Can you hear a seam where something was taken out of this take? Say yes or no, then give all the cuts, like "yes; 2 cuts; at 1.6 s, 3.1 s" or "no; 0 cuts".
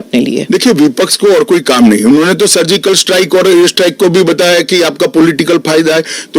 no; 0 cuts